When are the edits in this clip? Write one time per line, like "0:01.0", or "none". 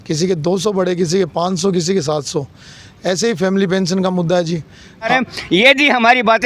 0:05.1